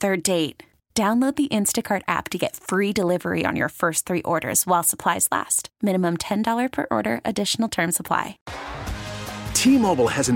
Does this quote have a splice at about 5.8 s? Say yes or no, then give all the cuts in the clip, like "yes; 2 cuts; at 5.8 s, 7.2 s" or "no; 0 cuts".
no; 1 cut; at 8.4 s